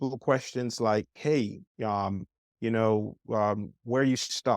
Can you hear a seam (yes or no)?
no